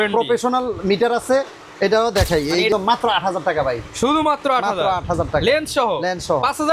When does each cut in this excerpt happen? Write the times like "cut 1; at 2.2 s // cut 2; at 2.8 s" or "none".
cut 1; at 2.7 s